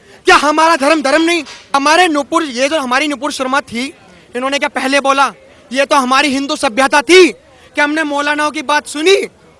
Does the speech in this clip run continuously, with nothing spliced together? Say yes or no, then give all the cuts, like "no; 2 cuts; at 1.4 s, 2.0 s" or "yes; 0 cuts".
no; 1 cut; at 1.7 s